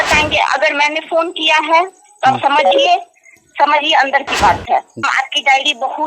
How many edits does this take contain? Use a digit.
1